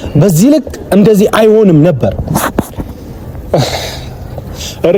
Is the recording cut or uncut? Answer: uncut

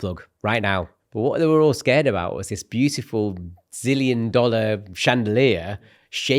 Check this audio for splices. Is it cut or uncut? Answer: cut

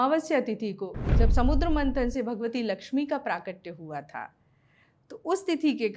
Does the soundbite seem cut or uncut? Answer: uncut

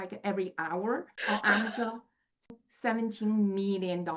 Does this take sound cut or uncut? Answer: cut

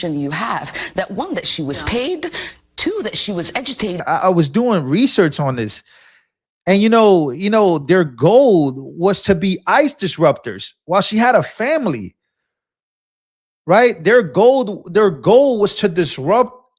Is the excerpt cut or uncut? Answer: cut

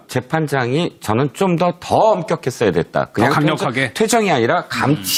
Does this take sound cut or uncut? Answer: uncut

